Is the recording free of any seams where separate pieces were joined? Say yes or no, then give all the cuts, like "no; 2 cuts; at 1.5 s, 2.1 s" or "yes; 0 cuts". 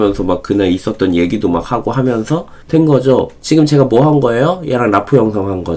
yes; 0 cuts